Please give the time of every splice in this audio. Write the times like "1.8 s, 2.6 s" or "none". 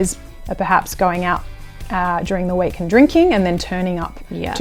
none